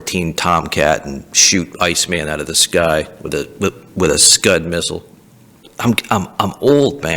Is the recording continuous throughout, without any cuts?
no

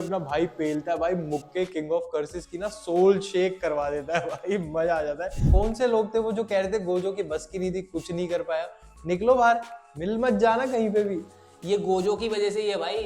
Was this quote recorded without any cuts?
no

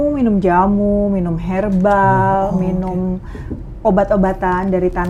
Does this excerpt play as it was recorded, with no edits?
yes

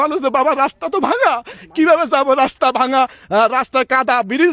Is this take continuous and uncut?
yes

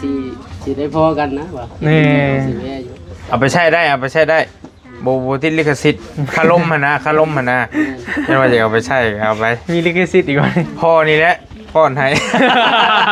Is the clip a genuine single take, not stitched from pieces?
yes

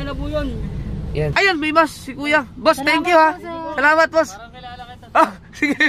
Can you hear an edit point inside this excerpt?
yes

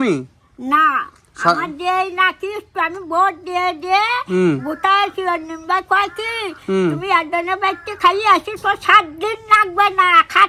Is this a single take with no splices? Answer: yes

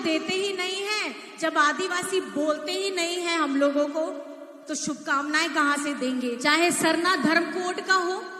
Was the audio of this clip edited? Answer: yes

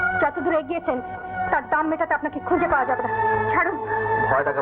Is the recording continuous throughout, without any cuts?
yes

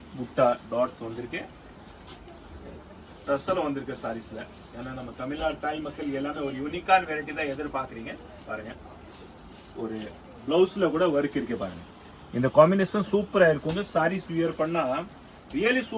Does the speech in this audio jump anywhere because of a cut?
no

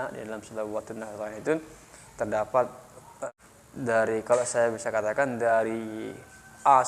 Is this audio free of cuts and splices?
no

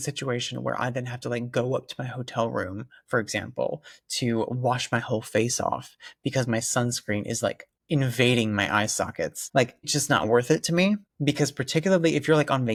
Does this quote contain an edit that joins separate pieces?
no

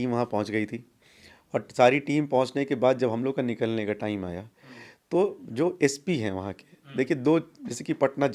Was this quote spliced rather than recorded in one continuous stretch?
no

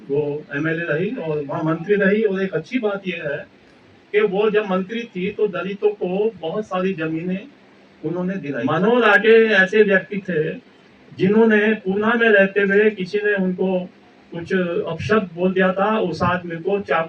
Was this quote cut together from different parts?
yes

